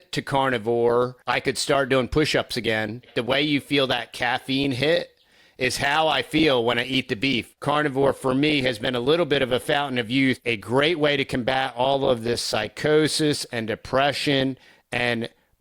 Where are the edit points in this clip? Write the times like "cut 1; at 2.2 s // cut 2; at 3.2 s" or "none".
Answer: cut 1; at 1.2 s // cut 2; at 3.1 s // cut 3; at 7.5 s // cut 4; at 10.4 s